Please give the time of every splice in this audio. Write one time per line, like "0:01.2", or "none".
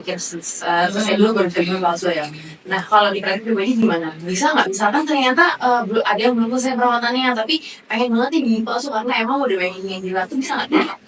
none